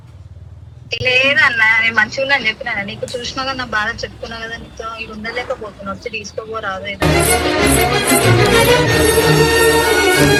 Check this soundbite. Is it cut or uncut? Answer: uncut